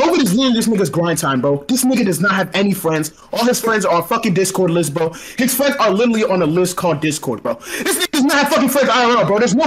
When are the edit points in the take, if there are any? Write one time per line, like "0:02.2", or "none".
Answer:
none